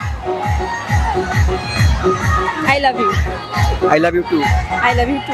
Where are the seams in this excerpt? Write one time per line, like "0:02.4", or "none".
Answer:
none